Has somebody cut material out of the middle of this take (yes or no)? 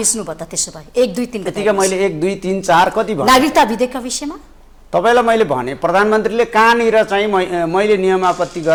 no